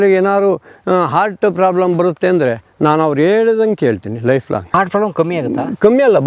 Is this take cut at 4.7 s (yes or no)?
yes